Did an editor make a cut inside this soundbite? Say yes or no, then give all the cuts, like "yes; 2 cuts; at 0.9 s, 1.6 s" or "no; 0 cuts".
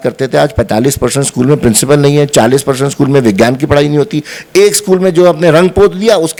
no; 0 cuts